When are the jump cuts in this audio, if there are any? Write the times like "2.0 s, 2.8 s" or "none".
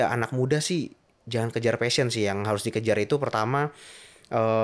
none